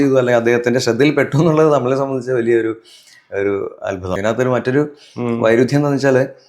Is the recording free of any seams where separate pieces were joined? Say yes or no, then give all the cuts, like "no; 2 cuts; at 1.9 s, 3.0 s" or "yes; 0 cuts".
no; 1 cut; at 4.1 s